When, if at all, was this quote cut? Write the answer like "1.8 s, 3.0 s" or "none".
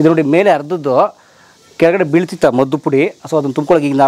none

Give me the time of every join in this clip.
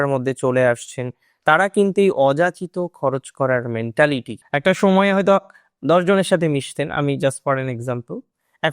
4.4 s

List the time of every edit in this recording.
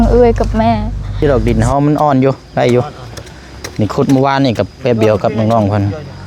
1.2 s

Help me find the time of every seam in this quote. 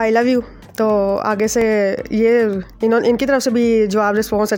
none

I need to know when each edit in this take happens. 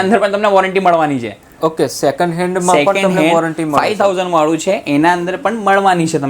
none

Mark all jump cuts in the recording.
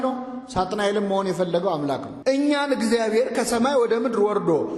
2.1 s

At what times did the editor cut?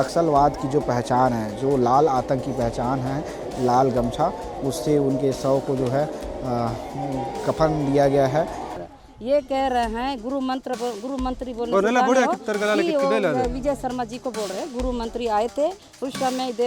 8.8 s

